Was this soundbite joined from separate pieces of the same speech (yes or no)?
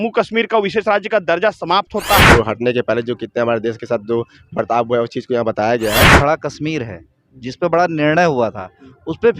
yes